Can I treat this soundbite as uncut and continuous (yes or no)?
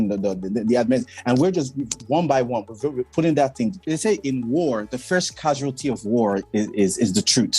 no